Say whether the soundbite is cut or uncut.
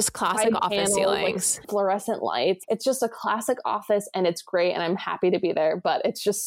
cut